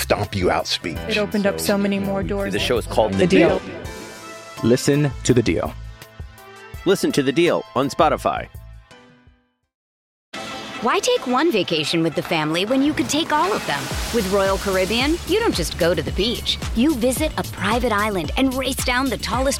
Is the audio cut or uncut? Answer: cut